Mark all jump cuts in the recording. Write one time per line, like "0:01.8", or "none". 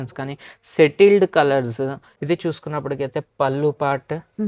0:02.1